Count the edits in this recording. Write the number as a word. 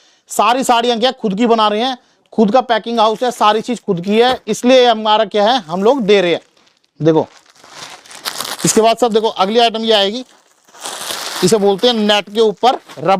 zero